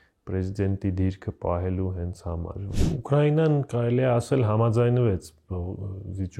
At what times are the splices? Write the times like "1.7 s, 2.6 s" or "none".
2.6 s